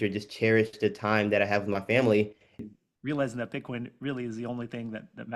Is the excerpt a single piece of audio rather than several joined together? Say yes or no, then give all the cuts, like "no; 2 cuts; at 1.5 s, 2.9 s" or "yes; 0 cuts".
no; 1 cut; at 2.6 s